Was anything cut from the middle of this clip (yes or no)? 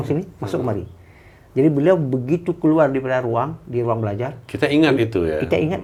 no